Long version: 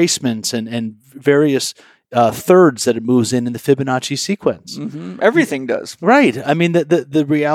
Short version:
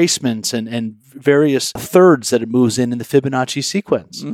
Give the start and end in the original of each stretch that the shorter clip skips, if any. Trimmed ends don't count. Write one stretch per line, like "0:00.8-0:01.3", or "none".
0:01.8-0:02.4